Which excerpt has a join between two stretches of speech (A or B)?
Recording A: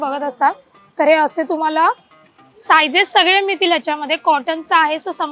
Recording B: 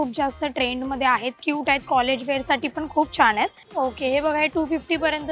B